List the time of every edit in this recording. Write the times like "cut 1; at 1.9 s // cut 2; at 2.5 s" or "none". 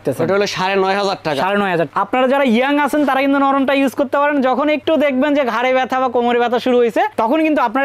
cut 1; at 1.9 s